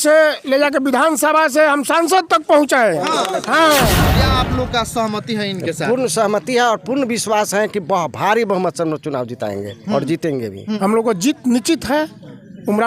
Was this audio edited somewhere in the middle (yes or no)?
yes